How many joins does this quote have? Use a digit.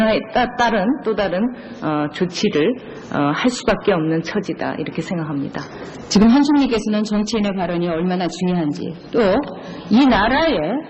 1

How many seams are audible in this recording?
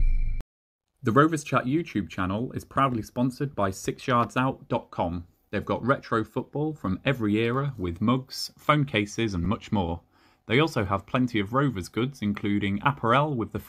1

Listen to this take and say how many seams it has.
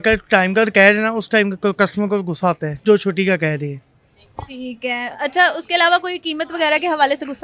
0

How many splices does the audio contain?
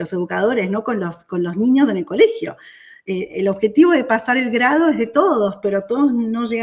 0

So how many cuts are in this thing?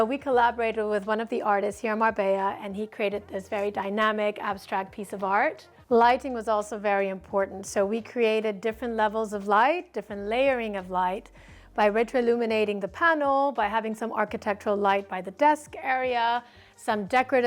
0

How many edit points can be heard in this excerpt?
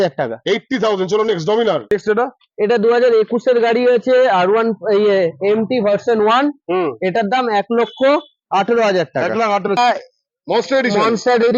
2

